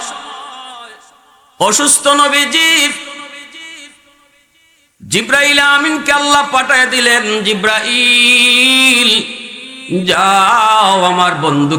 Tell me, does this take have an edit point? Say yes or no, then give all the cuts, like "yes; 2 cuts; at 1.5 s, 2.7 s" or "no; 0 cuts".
no; 0 cuts